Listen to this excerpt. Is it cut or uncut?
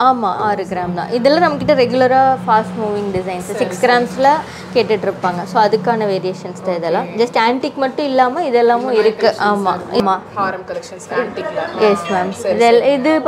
cut